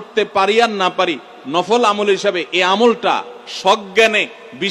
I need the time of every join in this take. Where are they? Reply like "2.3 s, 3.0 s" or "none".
none

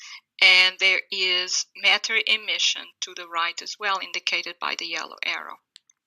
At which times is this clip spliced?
1.1 s

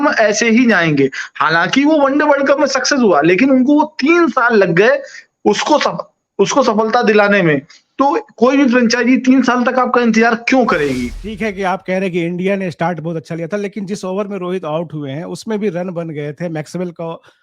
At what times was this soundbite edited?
11.2 s

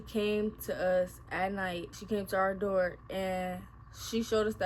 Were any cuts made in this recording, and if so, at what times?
1.9 s

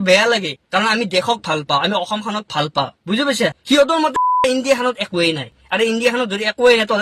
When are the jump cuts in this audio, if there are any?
3.6 s

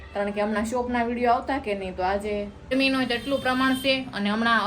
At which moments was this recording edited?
2.7 s

